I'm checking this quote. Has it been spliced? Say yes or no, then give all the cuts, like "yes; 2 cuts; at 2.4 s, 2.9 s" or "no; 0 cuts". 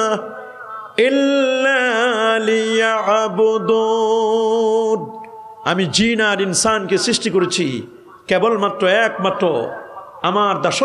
no; 0 cuts